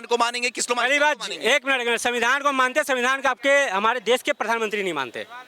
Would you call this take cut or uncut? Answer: uncut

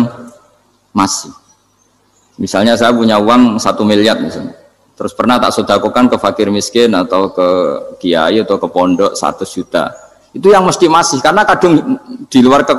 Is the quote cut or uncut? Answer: uncut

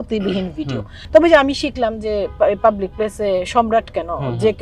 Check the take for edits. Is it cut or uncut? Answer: cut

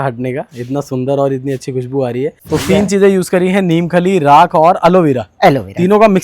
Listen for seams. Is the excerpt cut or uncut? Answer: cut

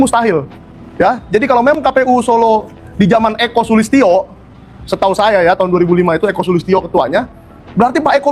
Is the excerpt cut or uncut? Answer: uncut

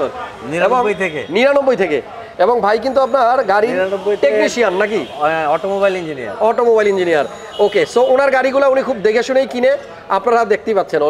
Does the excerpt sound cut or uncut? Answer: uncut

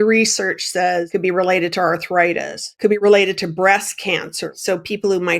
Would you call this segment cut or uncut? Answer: cut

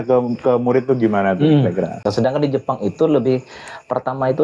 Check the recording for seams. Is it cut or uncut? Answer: cut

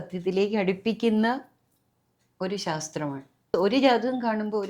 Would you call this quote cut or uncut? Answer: cut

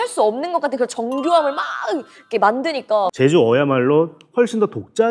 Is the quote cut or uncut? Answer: cut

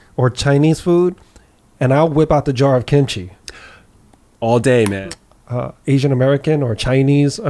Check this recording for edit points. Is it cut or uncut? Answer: cut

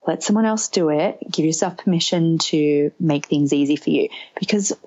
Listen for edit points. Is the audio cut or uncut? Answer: uncut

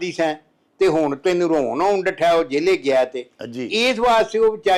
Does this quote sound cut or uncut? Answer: uncut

